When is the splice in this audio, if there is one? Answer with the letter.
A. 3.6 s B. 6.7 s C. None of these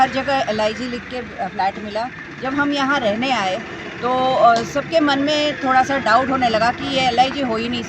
C